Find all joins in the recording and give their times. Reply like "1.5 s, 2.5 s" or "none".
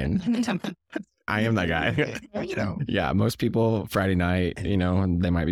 1.3 s, 2.8 s